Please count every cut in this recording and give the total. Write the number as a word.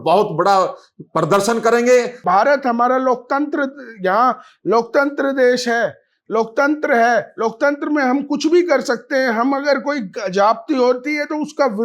one